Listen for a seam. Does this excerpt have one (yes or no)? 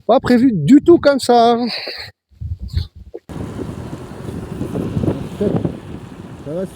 yes